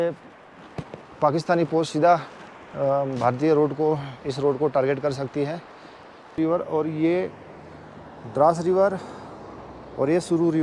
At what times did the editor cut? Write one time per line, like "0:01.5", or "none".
0:06.4